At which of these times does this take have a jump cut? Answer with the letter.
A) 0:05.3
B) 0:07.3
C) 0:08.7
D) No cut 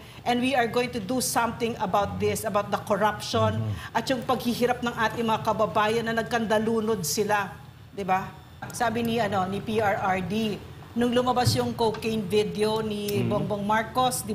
C